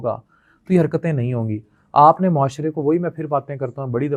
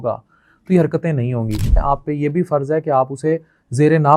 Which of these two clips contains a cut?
second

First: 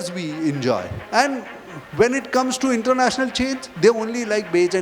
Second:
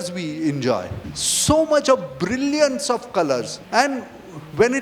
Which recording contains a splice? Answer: first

